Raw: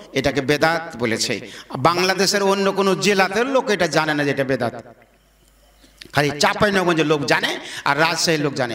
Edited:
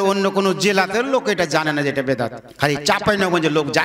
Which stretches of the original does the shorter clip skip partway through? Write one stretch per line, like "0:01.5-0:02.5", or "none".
0:04.8-0:06.0